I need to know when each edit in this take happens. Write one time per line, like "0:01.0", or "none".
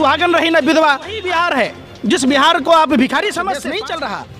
0:01.2
0:03.4